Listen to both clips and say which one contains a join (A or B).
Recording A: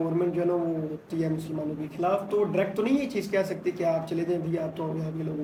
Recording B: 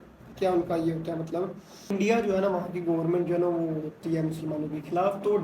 B